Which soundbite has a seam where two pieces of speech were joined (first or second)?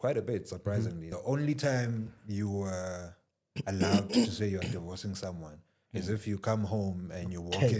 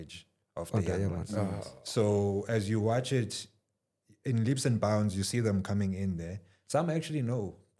first